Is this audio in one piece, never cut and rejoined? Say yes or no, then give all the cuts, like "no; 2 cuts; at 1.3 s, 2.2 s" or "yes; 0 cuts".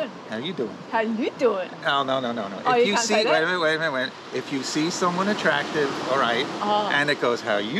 yes; 0 cuts